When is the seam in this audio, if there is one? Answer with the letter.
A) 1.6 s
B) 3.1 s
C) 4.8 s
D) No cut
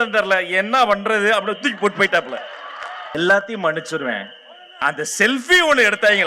B